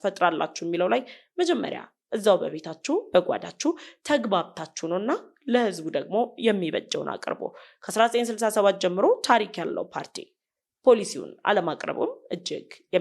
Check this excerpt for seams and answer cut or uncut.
uncut